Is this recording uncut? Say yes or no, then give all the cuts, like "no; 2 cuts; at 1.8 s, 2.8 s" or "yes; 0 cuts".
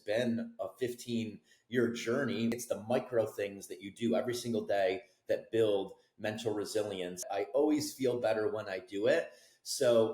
no; 2 cuts; at 2.5 s, 7.3 s